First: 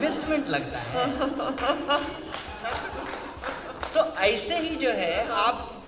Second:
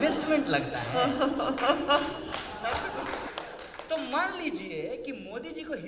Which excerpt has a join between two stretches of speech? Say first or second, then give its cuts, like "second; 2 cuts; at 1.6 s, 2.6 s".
second; 1 cut; at 3.3 s